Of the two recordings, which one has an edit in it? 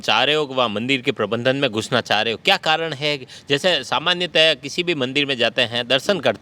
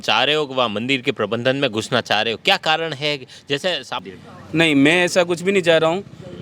second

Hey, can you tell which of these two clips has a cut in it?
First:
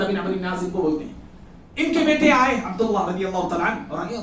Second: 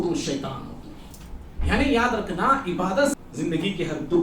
second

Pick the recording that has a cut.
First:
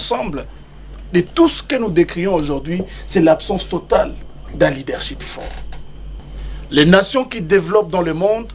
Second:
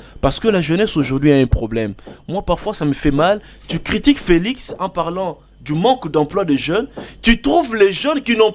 first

